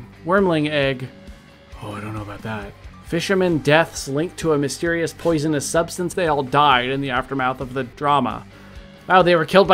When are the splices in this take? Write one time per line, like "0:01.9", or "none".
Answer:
0:02.9
0:06.1
0:07.9